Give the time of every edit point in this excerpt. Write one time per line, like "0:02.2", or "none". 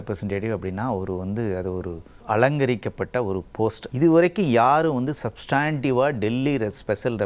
0:02.2
0:03.8